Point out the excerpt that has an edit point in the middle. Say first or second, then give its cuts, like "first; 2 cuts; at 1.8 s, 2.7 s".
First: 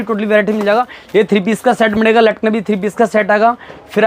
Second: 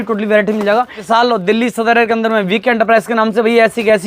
second; 1 cut; at 1.0 s